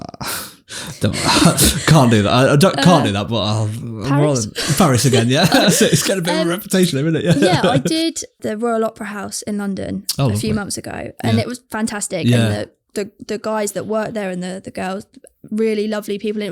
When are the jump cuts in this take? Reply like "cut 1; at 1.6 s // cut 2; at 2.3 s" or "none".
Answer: cut 1; at 8.4 s